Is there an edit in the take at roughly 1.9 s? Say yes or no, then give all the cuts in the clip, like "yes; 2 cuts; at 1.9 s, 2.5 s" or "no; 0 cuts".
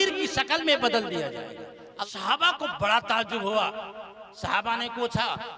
yes; 1 cut; at 1.9 s